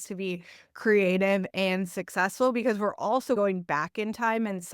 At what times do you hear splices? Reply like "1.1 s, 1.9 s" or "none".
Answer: 3.4 s

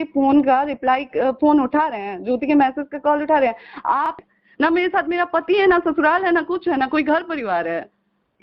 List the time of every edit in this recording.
4.2 s

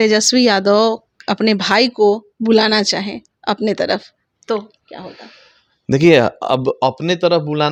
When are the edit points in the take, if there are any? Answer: none

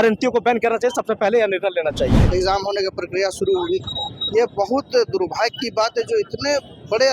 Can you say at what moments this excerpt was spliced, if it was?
2.2 s

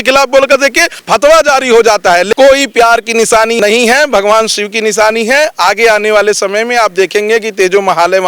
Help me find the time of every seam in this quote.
1.0 s, 2.3 s, 3.6 s

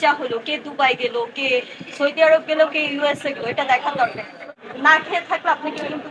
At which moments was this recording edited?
4.6 s

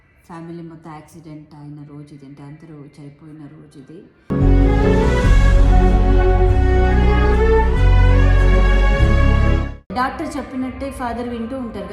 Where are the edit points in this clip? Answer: 9.8 s

